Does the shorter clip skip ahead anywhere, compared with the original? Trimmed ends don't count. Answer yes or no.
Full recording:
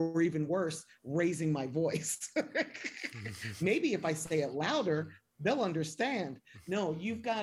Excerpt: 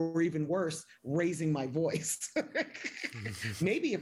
no